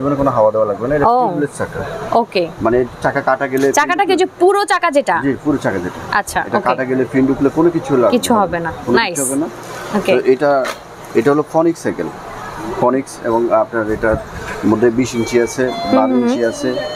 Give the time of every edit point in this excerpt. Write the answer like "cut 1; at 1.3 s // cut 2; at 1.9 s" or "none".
none